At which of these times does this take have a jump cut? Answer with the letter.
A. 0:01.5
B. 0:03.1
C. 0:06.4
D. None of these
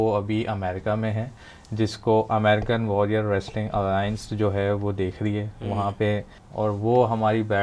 C